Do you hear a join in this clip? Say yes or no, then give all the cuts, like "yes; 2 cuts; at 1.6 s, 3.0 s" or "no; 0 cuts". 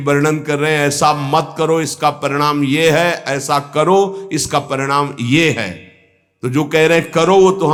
no; 0 cuts